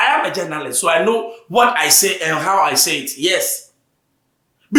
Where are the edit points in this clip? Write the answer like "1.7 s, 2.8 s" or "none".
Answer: none